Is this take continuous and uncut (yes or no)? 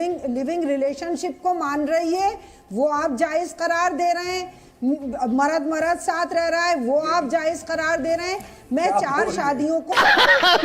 yes